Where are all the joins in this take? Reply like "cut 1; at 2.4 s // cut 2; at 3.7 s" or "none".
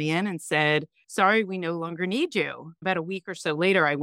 cut 1; at 1.0 s // cut 2; at 2.8 s